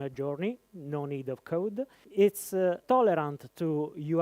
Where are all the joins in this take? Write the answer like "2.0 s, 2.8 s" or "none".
2.0 s, 2.8 s